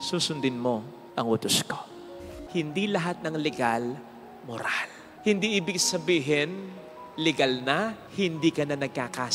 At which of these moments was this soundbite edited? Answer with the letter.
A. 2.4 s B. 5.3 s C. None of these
A